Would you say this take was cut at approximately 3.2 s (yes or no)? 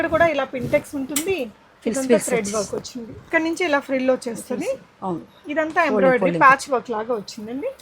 yes